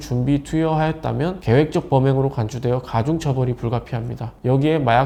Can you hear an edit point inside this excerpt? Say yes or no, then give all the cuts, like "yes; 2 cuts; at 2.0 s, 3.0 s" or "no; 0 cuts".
no; 0 cuts